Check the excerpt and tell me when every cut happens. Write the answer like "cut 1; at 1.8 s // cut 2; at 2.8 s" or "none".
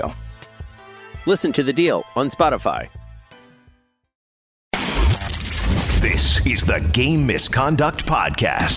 cut 1; at 4.6 s